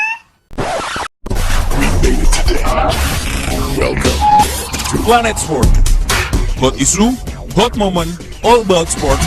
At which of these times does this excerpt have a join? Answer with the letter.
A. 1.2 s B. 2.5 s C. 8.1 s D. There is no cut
A